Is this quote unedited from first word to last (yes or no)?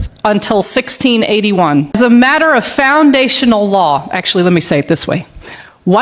no